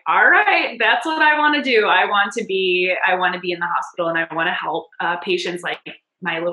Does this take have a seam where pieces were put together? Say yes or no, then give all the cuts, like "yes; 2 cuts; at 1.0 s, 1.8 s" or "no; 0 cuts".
no; 0 cuts